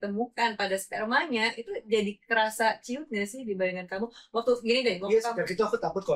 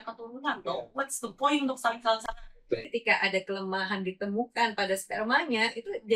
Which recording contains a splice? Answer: second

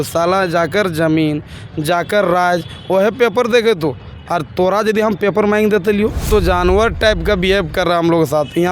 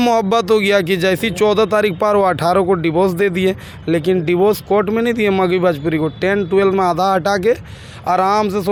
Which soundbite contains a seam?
first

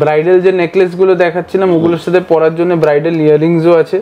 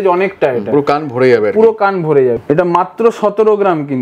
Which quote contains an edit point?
second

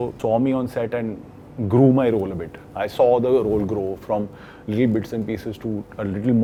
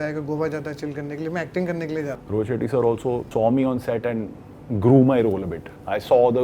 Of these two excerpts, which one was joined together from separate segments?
second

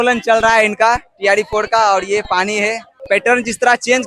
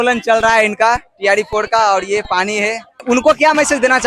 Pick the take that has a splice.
second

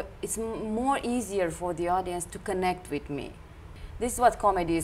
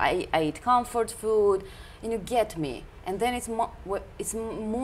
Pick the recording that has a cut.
first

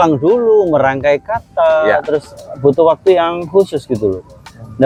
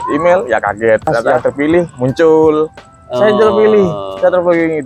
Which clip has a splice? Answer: second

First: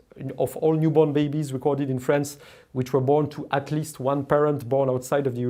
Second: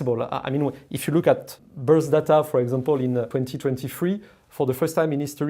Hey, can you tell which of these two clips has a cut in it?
second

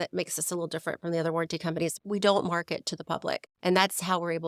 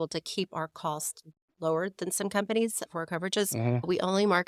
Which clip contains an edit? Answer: first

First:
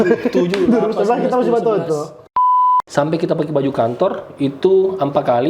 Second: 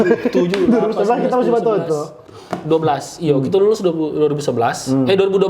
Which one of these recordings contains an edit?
first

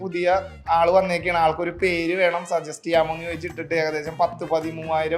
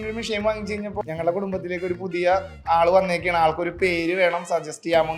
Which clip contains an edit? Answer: second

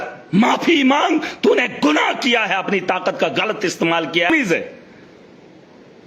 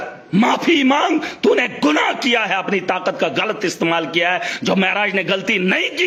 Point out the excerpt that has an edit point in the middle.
first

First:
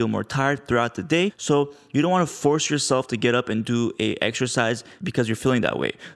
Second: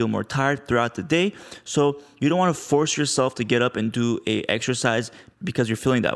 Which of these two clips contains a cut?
first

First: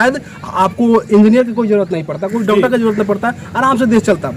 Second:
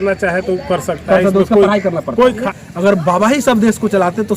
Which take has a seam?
second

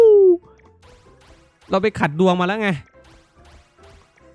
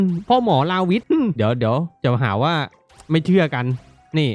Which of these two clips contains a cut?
second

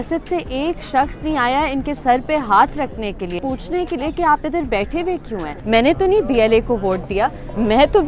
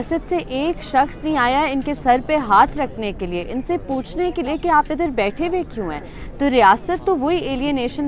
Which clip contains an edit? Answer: first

